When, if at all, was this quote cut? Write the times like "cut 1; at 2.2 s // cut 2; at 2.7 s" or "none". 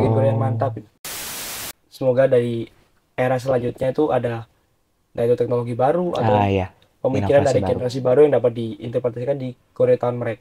cut 1; at 1.4 s